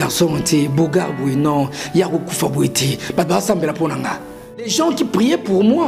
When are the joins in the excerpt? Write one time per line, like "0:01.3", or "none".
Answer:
0:04.7